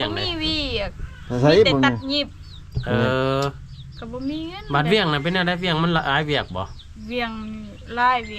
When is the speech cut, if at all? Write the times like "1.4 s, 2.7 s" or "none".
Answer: none